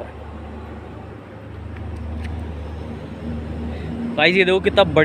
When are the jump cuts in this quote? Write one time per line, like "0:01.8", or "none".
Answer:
none